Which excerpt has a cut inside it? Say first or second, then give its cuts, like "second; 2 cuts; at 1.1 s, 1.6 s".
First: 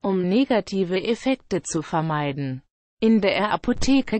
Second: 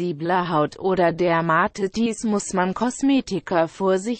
second; 1 cut; at 1.1 s